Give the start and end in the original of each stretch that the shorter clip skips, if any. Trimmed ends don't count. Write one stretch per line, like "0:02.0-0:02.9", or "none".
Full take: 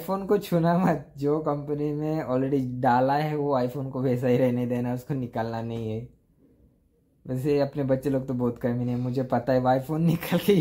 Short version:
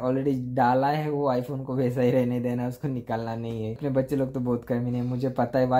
0:06.0-0:07.7